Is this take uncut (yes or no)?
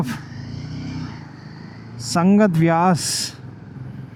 yes